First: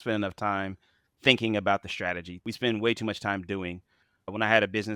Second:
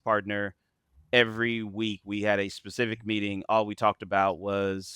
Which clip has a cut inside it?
first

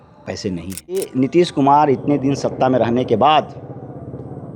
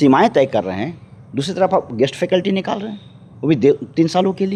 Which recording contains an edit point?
first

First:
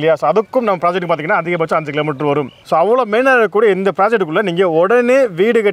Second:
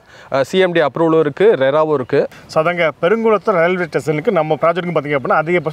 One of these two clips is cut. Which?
second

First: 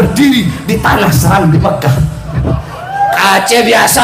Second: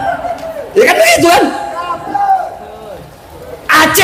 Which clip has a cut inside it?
first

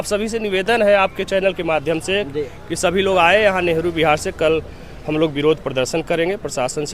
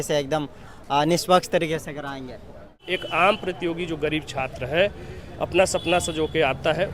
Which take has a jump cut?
second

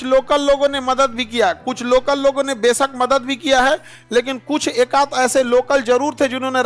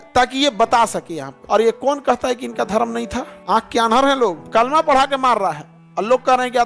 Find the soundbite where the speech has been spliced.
second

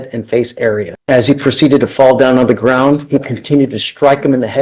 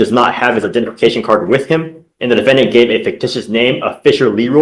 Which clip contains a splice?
first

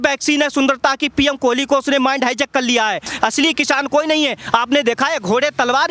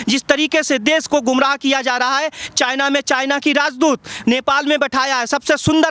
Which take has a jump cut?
first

